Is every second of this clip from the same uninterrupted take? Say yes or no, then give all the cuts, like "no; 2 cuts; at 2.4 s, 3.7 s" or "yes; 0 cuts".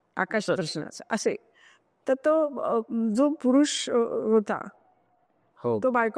yes; 0 cuts